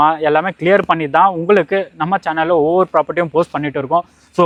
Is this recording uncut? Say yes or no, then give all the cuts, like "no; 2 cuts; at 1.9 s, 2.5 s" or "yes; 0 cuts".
yes; 0 cuts